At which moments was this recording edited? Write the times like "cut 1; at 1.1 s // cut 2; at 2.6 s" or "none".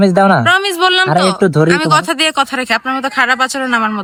none

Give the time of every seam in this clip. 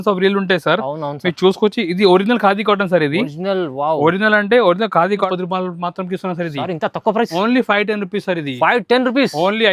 cut 1; at 5.3 s

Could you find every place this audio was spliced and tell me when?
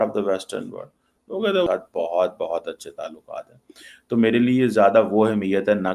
cut 1; at 1.7 s

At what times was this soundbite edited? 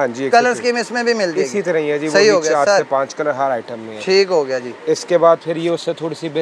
none

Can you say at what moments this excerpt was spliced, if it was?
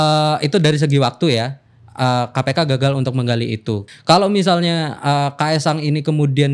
cut 1; at 3.8 s

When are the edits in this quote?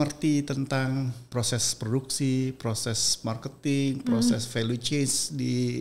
cut 1; at 1.3 s

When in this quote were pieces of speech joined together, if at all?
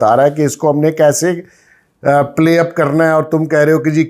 none

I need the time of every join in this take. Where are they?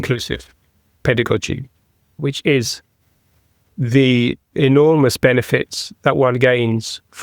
cut 1; at 2.0 s

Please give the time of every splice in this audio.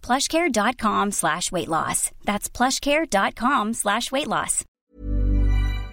cut 1; at 4.8 s

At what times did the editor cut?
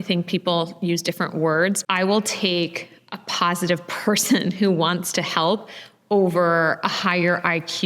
cut 1; at 1.8 s

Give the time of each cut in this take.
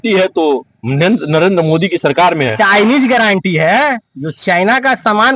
none

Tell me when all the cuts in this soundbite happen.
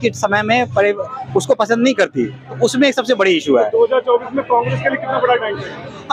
none

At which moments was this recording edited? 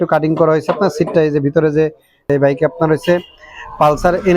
cut 1; at 2.3 s

